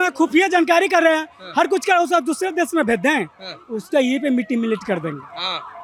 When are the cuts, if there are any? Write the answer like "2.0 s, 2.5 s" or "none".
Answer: none